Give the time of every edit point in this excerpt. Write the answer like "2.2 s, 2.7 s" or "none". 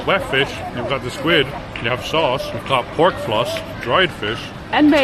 1.6 s, 2.5 s, 3.7 s